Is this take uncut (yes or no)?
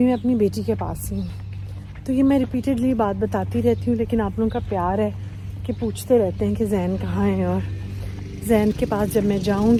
yes